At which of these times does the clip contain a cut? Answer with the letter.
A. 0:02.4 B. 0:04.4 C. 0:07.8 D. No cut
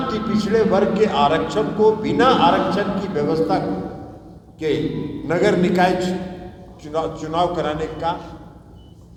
D